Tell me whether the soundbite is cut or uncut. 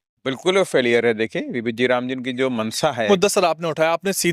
cut